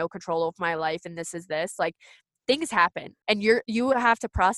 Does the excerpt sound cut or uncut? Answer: cut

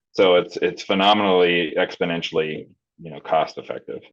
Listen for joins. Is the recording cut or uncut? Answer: uncut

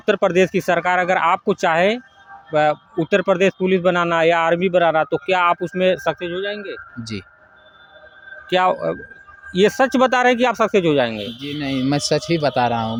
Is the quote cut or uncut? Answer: uncut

